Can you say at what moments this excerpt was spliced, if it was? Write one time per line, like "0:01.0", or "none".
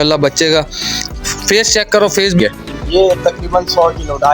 0:02.4